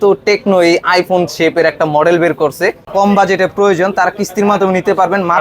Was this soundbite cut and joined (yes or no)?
yes